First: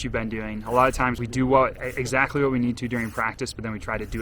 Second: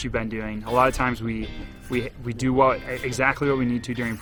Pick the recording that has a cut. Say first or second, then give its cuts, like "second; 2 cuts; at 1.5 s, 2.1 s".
first; 1 cut; at 1.2 s